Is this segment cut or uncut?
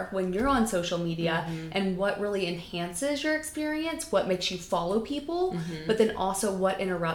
uncut